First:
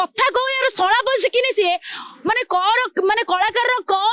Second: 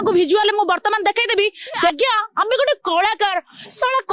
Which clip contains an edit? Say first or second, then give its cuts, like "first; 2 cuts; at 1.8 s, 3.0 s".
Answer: second; 1 cut; at 1.9 s